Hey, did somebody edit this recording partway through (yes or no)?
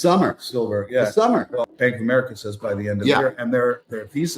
yes